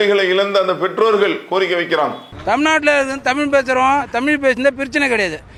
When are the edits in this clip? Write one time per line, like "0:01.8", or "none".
none

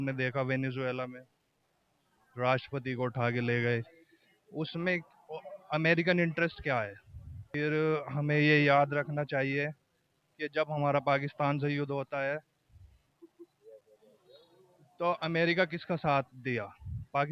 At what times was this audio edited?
0:07.5

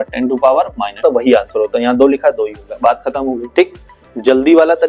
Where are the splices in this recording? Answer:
0:01.0

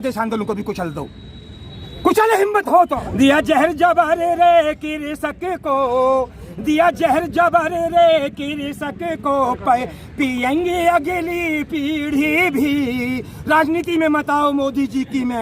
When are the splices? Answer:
0:03.1

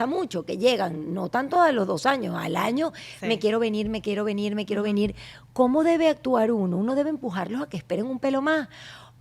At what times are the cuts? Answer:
none

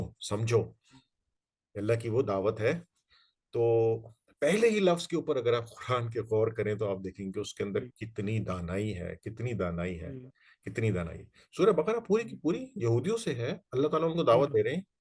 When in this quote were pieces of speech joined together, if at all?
none

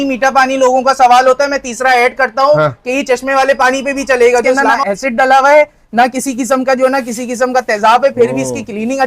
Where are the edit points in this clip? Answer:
0:04.7

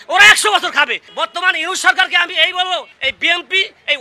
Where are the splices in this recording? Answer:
0:01.0
0:02.9

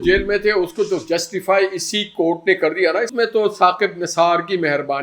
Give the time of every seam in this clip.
0:03.1

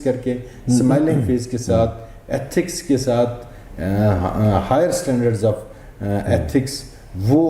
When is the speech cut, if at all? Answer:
none

